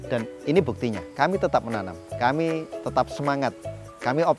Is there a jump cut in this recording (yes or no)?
no